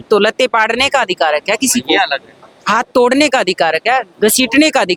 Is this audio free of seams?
yes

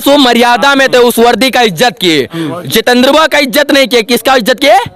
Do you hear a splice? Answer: no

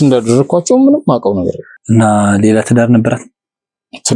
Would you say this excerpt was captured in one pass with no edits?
no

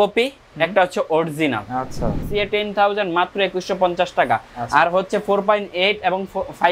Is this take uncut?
no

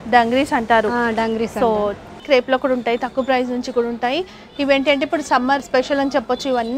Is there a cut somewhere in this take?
yes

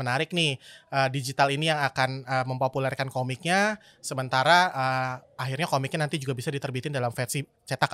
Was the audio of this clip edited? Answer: no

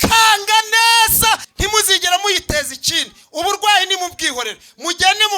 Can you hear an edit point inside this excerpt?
yes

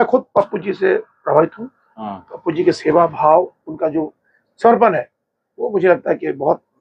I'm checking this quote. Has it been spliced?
no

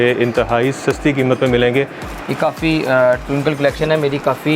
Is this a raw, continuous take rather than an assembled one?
no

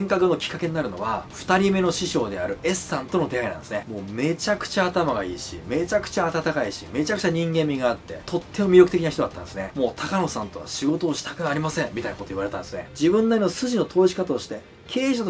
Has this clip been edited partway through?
yes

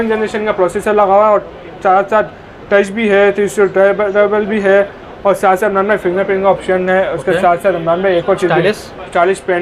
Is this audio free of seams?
yes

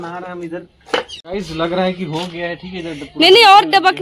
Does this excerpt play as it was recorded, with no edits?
no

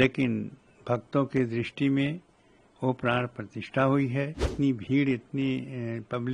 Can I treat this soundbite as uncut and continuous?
no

